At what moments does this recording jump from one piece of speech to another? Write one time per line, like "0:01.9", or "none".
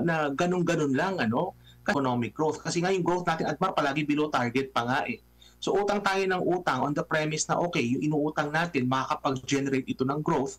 0:01.9